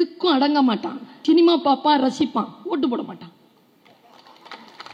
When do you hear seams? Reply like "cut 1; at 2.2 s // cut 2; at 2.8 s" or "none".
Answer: cut 1; at 1.1 s